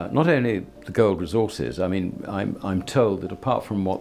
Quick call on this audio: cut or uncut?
uncut